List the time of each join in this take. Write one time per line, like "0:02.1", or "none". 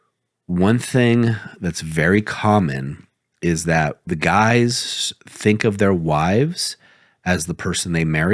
0:04.0